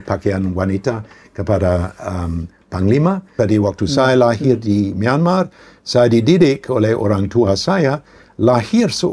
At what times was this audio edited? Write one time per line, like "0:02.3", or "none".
0:03.3

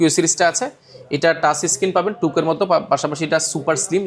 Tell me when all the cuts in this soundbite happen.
none

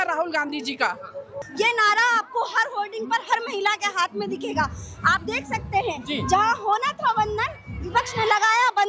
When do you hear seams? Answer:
0:01.4

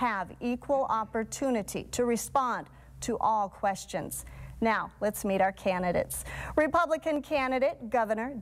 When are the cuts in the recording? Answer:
0:04.3

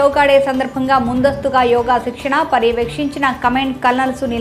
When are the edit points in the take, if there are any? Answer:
none

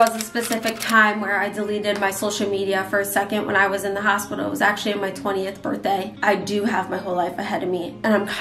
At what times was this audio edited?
0:06.1

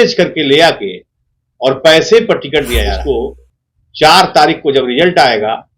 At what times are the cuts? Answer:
0:03.0

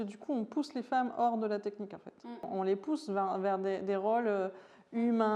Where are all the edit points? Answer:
0:02.4

